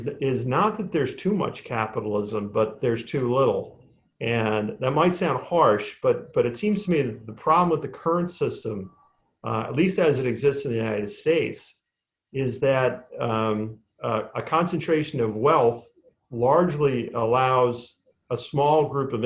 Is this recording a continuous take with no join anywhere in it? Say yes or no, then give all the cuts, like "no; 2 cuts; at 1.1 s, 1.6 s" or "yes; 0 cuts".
yes; 0 cuts